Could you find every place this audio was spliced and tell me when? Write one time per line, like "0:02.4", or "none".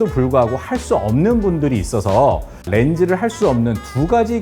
0:02.7